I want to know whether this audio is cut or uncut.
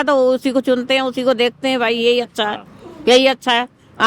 uncut